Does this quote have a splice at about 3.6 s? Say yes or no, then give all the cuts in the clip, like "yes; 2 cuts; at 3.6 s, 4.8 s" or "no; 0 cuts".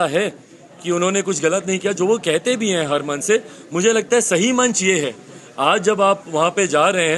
no; 0 cuts